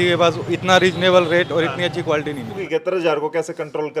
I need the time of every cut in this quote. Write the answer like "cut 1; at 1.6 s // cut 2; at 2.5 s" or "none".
cut 1; at 2.6 s

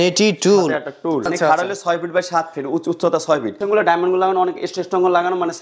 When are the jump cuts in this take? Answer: cut 1; at 1.3 s // cut 2; at 3.6 s

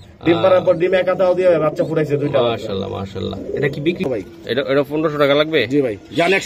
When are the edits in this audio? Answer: cut 1; at 4.1 s

